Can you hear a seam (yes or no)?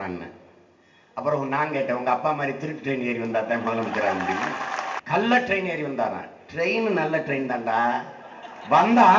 yes